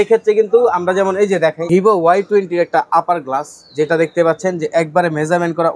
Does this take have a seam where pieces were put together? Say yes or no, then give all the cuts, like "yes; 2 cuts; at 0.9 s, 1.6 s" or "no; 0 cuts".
yes; 1 cut; at 1.6 s